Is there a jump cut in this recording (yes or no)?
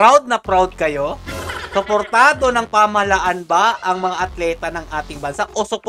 no